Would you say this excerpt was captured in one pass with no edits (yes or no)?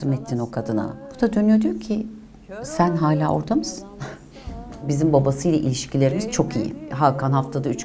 no